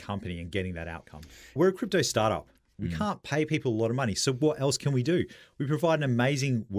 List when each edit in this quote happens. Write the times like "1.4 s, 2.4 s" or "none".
1.6 s, 2.8 s